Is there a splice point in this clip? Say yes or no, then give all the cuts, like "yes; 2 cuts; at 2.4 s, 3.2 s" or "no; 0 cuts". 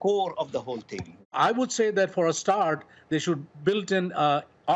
yes; 1 cut; at 1.3 s